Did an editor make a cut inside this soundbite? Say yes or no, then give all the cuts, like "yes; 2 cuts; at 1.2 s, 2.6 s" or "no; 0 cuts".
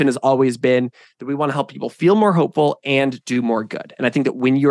no; 0 cuts